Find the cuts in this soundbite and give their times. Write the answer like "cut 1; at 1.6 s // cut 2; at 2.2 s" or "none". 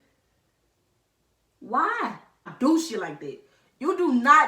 cut 1; at 2.5 s

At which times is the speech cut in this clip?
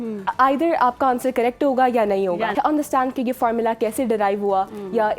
cut 1; at 2.5 s

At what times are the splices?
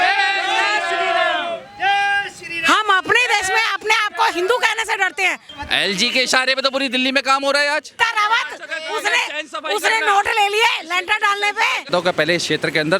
cut 1; at 5.5 s // cut 2; at 8.0 s // cut 3; at 11.9 s

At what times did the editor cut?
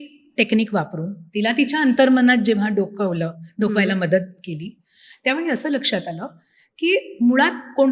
none

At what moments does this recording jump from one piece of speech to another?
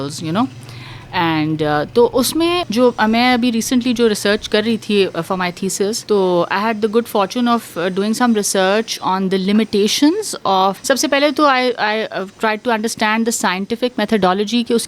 cut 1; at 2.6 s // cut 2; at 6.0 s // cut 3; at 10.8 s

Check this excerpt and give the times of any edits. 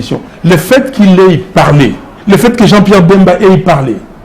cut 1; at 2.1 s

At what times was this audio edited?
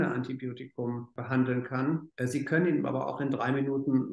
cut 1; at 1.1 s // cut 2; at 2.1 s

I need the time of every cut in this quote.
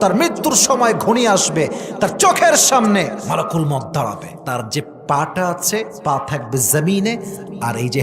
cut 1; at 3.2 s // cut 2; at 4.3 s // cut 3; at 5.9 s

